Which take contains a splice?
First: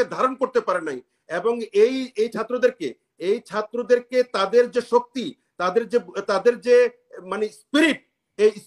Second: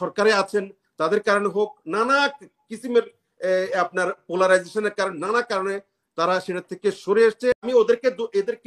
second; 1 cut; at 7.6 s

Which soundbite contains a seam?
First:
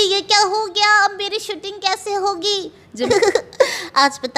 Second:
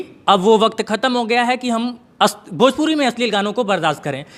first; 1 cut; at 3.1 s

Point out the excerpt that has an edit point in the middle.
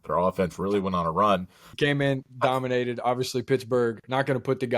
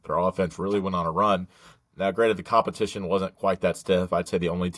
first; 1 cut; at 1.6 s

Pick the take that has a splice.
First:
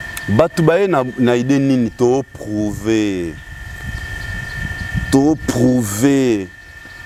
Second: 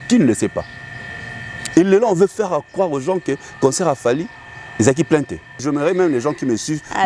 second; 1 cut; at 5.6 s

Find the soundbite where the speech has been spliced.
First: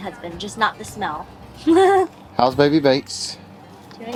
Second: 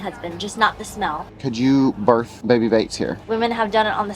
second; 3 cuts; at 1.4 s, 2.3 s, 3.3 s

